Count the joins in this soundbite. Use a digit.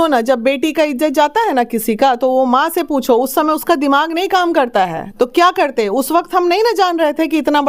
0